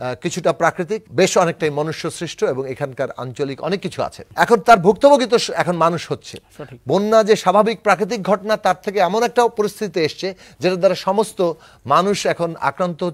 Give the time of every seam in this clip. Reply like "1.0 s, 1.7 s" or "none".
1.1 s, 4.2 s